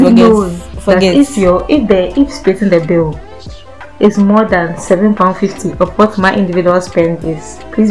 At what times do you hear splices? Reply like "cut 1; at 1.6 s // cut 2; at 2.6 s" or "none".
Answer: none

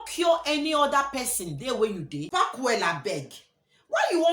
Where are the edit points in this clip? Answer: cut 1; at 2.3 s

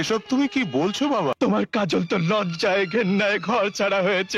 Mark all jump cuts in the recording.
cut 1; at 1.4 s

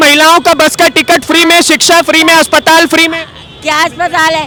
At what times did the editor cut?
none

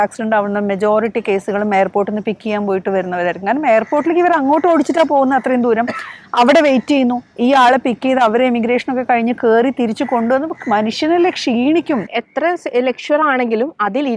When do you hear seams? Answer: cut 1; at 12.1 s

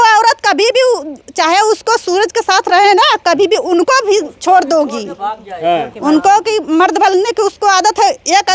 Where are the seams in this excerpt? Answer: none

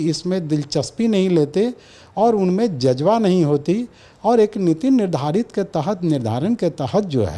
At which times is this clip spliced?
none

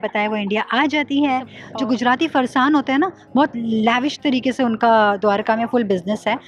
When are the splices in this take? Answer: cut 1; at 1.6 s

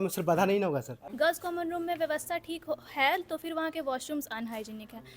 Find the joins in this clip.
cut 1; at 1.0 s

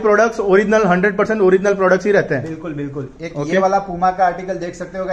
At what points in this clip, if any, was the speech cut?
none

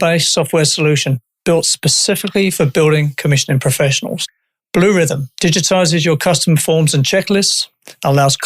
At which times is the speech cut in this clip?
cut 1; at 1.3 s

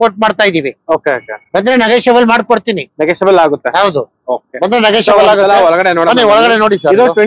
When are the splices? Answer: none

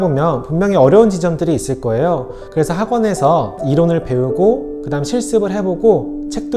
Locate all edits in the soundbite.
cut 1; at 2.3 s

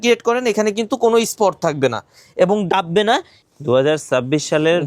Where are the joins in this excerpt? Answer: cut 1; at 3.3 s

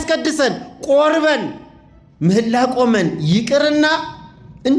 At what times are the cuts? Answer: none

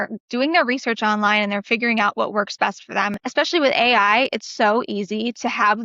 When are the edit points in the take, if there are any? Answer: cut 1; at 3.2 s

